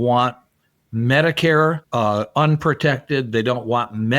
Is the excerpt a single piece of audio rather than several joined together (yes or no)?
no